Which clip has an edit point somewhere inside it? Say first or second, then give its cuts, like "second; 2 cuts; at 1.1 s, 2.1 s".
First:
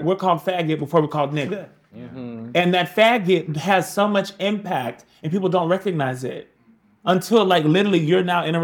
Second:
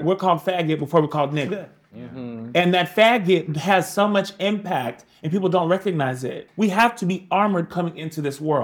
second; 1 cut; at 6.4 s